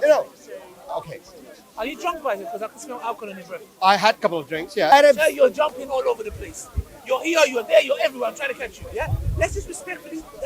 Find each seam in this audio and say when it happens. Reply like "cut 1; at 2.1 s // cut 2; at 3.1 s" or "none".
cut 1; at 4.9 s